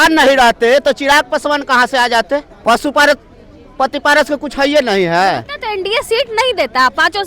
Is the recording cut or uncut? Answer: cut